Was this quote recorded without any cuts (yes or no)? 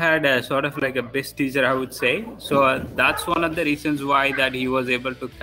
yes